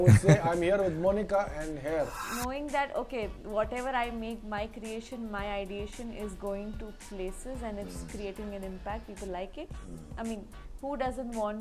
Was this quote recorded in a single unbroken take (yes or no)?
no